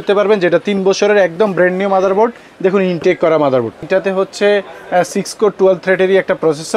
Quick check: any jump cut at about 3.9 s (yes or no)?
yes